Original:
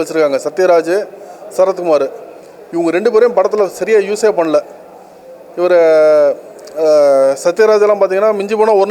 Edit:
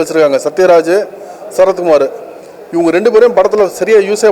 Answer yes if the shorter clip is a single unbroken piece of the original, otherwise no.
yes